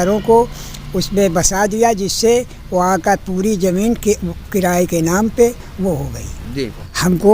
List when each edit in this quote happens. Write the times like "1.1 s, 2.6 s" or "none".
6.4 s